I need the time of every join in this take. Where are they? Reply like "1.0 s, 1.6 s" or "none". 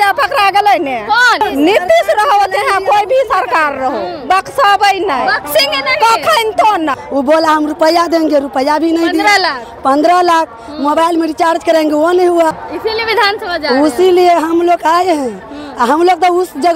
1.4 s, 7.0 s, 12.7 s